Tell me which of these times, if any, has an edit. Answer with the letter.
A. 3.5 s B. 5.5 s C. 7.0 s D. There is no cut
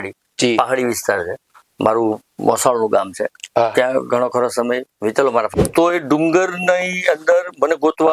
B